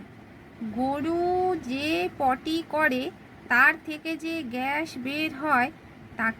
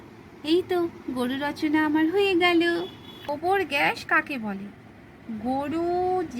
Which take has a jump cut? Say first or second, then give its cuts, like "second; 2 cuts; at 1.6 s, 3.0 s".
second; 1 cut; at 3.1 s